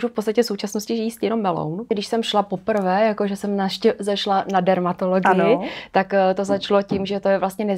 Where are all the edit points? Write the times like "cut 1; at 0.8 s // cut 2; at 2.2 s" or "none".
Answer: cut 1; at 1.9 s

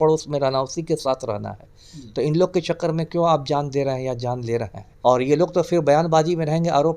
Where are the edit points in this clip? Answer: cut 1; at 4.8 s

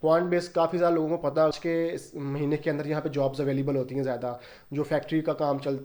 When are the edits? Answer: cut 1; at 1.5 s

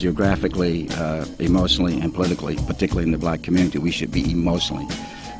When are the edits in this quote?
none

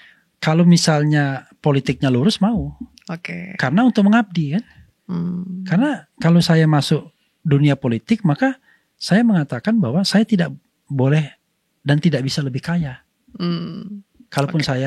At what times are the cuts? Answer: none

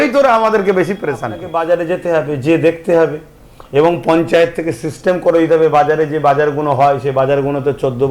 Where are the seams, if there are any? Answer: cut 1; at 1.5 s

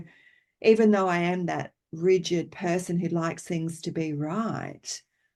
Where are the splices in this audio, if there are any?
none

